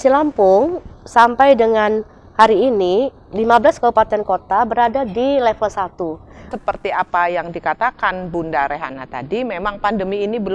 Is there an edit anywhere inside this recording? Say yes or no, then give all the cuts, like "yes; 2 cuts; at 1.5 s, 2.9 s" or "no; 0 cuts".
yes; 1 cut; at 6.5 s